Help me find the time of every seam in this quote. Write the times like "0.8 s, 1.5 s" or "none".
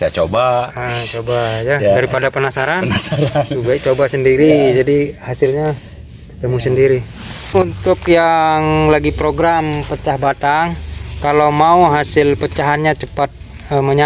7.4 s